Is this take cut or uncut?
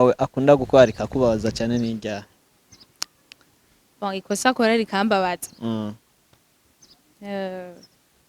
uncut